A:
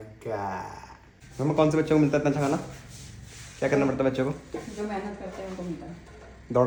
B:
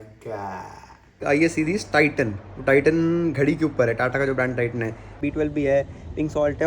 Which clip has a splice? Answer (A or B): B